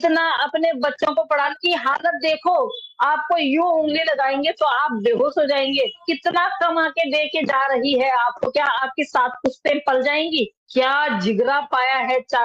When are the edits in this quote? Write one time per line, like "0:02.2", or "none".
0:01.5
0:06.0
0:10.6